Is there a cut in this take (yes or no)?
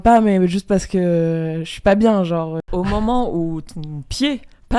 yes